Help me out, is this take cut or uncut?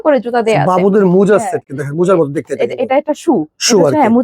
uncut